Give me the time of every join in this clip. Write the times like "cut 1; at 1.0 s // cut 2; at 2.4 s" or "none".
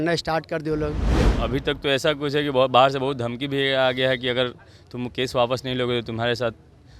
cut 1; at 1.3 s